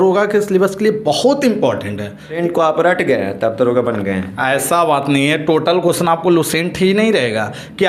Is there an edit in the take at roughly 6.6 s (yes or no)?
no